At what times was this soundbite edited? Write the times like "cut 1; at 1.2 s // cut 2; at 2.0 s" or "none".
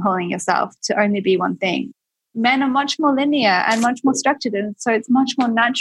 cut 1; at 1.9 s